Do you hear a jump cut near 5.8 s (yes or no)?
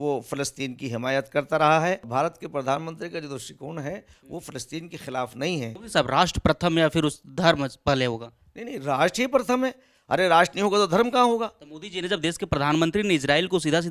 yes